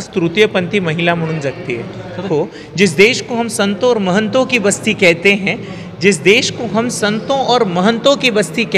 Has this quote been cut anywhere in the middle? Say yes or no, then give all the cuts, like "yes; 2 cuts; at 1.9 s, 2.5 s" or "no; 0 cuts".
yes; 1 cut; at 2.2 s